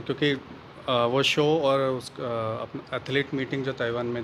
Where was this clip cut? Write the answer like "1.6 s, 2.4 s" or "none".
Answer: none